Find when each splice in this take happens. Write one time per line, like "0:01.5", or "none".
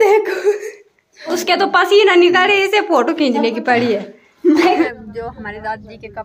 0:01.3
0:04.8